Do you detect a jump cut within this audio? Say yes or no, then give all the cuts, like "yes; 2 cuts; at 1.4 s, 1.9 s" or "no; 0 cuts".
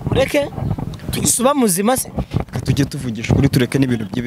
no; 0 cuts